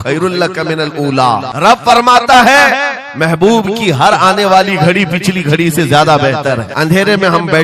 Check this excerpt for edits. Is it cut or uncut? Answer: cut